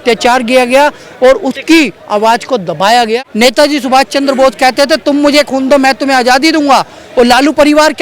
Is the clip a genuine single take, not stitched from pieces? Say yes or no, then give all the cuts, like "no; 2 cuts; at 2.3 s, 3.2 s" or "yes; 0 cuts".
no; 1 cut; at 3.1 s